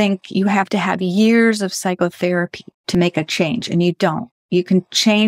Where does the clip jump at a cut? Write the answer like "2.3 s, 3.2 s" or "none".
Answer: 2.9 s